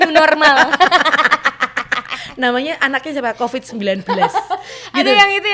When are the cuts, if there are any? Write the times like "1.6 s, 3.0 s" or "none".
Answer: none